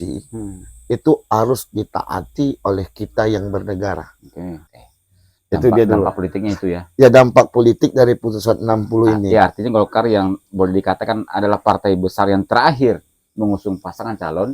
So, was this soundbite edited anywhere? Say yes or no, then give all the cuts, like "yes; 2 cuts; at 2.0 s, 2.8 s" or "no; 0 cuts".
yes; 1 cut; at 4.7 s